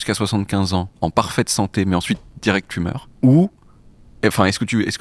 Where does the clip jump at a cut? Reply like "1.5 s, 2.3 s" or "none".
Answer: 0.9 s, 3.0 s